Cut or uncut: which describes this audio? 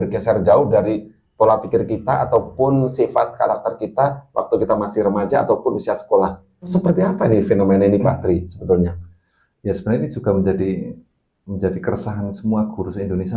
cut